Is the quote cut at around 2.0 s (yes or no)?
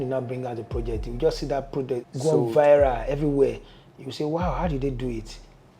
yes